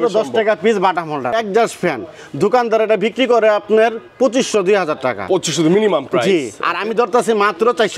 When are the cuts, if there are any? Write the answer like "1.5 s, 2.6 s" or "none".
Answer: 1.3 s